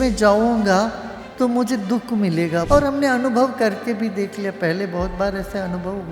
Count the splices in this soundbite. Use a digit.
1